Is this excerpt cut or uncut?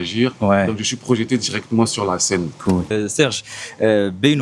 cut